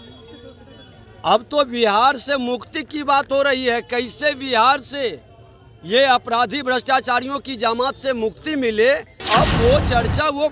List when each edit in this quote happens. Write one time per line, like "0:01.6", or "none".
0:09.1